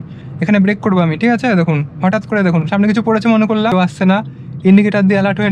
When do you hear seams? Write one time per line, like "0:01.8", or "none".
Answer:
0:03.7